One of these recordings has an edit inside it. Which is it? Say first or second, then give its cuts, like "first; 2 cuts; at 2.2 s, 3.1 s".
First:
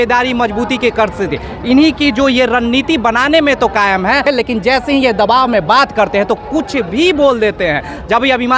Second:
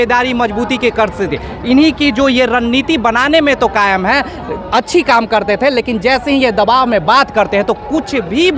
first; 1 cut; at 4.2 s